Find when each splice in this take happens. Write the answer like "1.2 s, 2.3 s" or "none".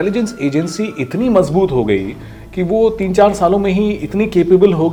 none